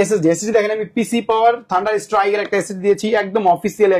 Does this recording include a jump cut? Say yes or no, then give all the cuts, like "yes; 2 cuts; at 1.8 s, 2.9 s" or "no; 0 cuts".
no; 0 cuts